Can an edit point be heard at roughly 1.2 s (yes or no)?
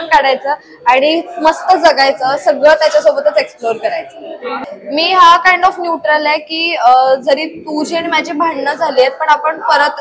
no